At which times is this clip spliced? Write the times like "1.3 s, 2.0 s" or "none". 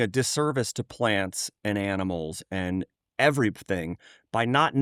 none